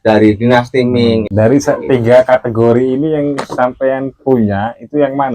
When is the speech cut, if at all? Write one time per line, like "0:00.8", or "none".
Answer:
0:01.3